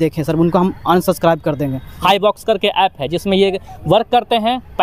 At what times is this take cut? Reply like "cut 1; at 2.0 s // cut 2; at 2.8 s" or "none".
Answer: cut 1; at 1.9 s